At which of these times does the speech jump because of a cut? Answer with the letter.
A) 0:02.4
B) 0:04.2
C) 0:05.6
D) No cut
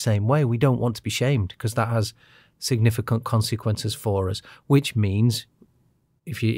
D